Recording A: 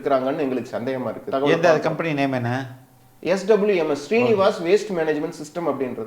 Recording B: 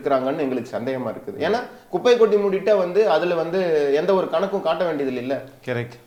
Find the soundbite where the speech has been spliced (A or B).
A